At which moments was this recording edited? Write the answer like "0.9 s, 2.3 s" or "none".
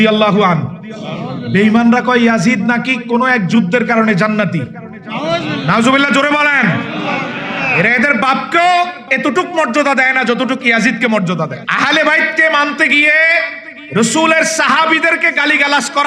11.6 s